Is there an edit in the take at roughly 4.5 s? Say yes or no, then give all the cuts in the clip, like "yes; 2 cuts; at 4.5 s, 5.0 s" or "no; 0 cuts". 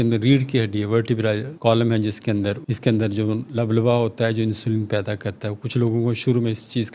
no; 2 cuts; at 1.5 s, 2.7 s